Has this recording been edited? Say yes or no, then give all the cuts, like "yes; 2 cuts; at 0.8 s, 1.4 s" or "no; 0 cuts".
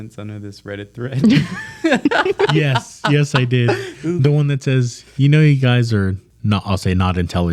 no; 0 cuts